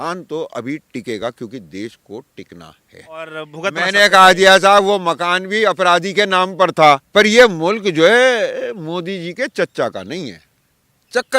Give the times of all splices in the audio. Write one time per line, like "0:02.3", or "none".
0:03.3
0:07.1